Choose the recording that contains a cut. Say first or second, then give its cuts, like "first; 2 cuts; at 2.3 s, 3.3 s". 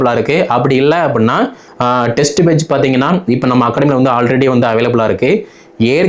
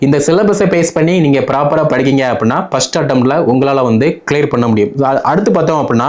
first; 1 cut; at 1.6 s